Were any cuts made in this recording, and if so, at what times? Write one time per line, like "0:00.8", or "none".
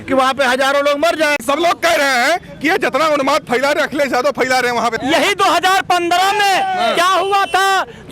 0:01.4
0:05.0